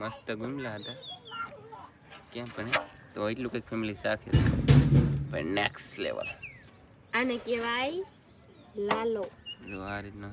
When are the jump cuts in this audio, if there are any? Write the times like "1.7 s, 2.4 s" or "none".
none